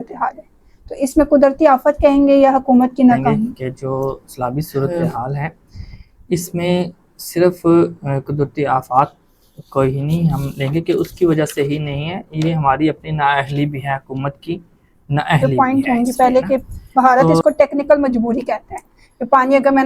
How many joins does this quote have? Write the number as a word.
two